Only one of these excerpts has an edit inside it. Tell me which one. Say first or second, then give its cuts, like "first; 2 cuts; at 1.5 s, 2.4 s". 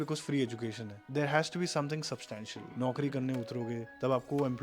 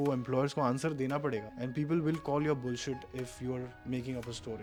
first; 2 cuts; at 1.0 s, 2.6 s